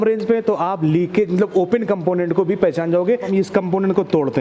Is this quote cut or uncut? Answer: cut